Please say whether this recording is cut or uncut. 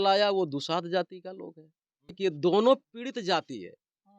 cut